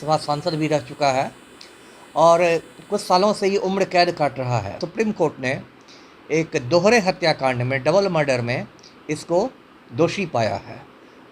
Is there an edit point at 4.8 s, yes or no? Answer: yes